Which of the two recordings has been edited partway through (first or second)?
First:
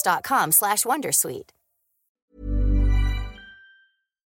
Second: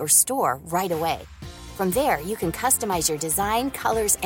first